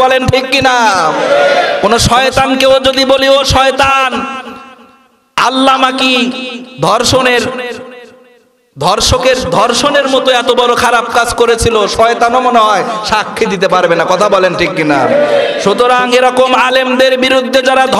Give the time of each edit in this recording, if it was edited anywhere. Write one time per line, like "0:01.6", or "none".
none